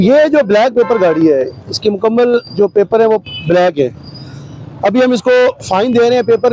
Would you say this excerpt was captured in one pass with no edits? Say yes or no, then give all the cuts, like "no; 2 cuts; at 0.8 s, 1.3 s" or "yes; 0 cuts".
yes; 0 cuts